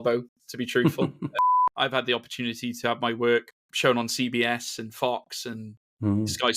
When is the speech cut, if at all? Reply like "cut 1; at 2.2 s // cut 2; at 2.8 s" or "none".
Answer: cut 1; at 1.4 s // cut 2; at 3.6 s